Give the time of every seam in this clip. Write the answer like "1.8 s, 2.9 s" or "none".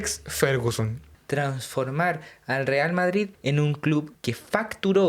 1.0 s, 3.3 s, 4.1 s